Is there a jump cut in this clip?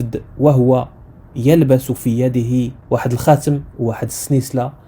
yes; 1 cut; at 2.8 s

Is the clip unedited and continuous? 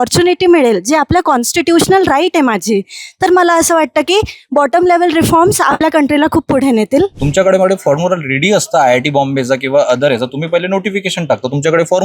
no; 1 cut; at 7.2 s

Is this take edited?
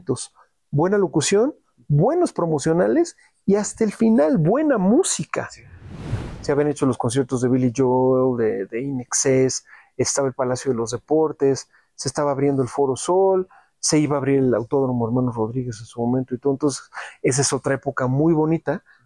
yes; 1 cut; at 6.1 s

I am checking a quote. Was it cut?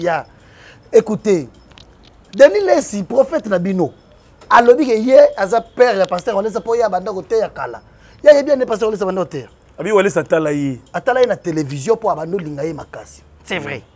no; 0 cuts

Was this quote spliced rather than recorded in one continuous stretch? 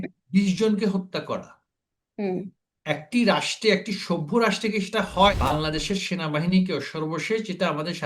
yes; 1 cut; at 5.3 s

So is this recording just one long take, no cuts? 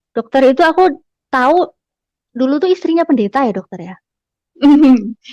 yes; 0 cuts

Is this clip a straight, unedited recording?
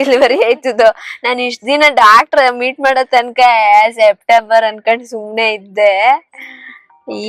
yes; 0 cuts

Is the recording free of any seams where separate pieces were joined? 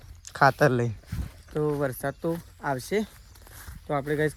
yes; 0 cuts

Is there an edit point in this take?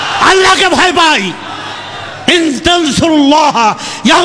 no; 0 cuts

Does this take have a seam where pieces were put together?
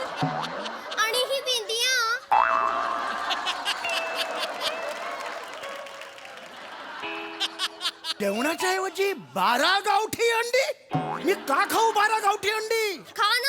yes; 1 cut; at 8.1 s

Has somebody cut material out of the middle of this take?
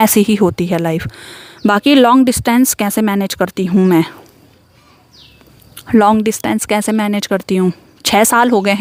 no; 0 cuts

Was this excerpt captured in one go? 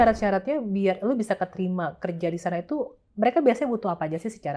yes; 0 cuts

